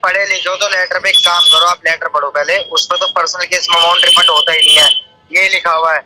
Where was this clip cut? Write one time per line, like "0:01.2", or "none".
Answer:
none